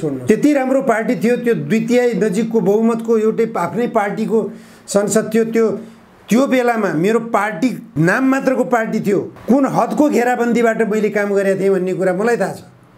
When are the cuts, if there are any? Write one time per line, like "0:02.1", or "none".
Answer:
none